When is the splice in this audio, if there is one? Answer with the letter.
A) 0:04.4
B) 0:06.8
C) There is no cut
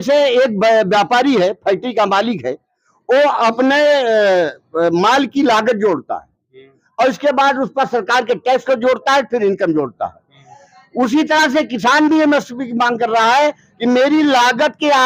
C